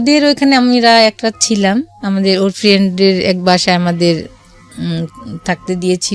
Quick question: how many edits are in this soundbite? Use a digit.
0